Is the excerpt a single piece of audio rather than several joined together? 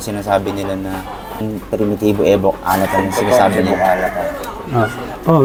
yes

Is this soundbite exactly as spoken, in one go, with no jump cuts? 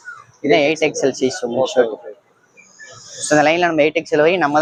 yes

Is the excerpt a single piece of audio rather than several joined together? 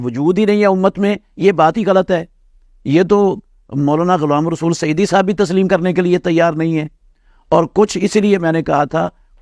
yes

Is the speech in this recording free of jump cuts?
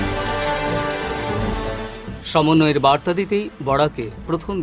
no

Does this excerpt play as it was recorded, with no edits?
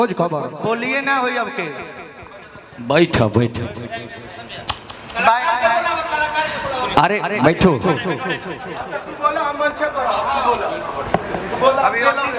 yes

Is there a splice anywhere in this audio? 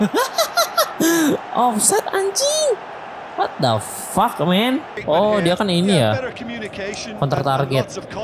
yes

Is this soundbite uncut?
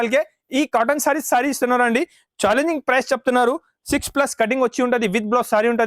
yes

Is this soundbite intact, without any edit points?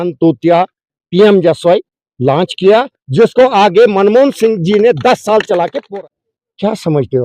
no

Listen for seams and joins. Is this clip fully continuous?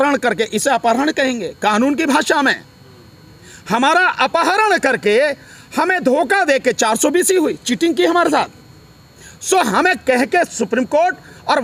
yes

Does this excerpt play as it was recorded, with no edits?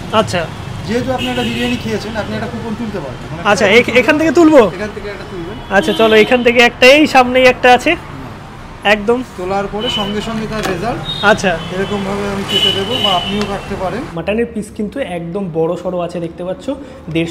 no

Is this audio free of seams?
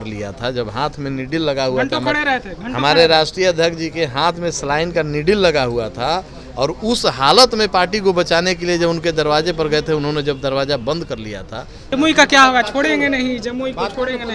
no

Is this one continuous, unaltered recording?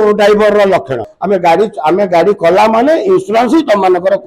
no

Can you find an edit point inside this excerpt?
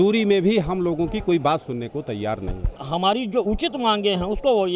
yes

